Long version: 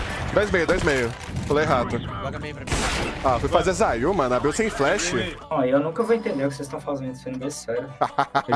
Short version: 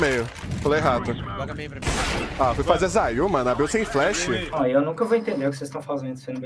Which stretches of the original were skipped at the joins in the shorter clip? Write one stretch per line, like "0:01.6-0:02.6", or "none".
0:05.3-0:05.4